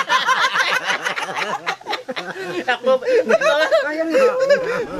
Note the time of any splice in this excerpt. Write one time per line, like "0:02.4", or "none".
none